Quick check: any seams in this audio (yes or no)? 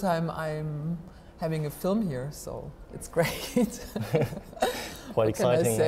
no